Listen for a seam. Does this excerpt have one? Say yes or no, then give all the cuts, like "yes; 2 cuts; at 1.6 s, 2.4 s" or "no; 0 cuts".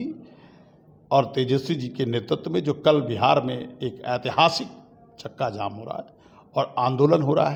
no; 0 cuts